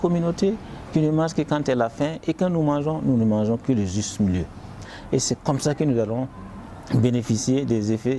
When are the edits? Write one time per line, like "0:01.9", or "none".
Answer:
0:04.8